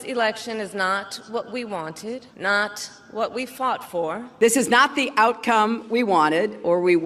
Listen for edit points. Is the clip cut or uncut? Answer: cut